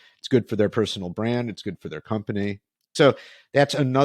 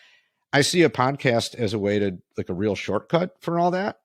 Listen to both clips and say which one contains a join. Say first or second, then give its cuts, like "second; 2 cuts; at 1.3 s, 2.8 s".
first; 1 cut; at 2.9 s